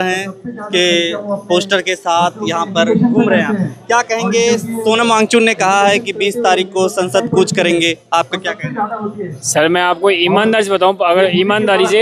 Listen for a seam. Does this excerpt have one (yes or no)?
no